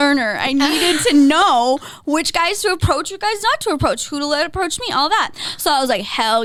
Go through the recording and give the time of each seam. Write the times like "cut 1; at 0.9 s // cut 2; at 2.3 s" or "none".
none